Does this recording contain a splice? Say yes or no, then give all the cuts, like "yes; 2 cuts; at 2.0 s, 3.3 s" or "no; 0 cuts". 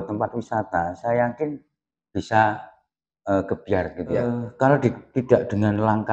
yes; 1 cut; at 4.4 s